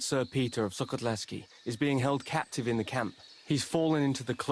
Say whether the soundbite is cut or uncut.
uncut